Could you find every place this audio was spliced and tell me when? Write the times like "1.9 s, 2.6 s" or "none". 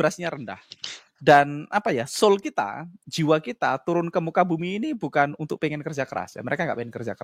none